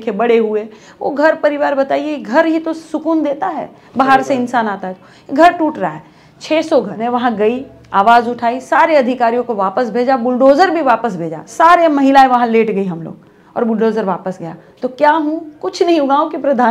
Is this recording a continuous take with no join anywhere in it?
yes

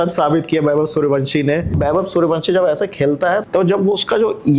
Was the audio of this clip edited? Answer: yes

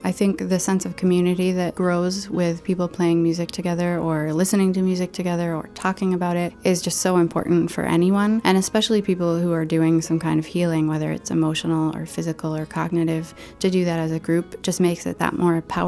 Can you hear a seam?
yes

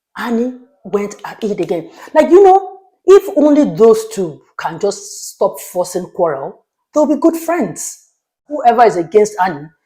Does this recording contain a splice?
yes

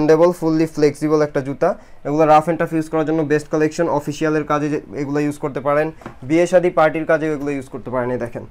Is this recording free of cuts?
yes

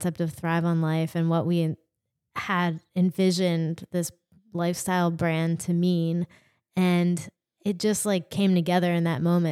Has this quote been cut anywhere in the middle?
no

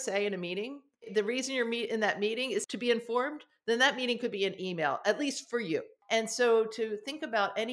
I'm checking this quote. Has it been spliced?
yes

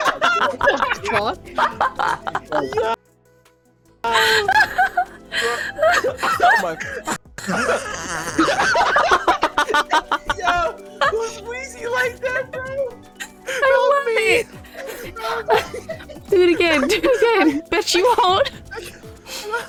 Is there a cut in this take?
no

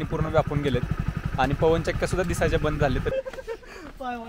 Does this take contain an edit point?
yes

